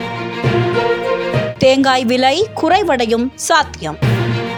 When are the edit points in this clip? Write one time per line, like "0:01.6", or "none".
none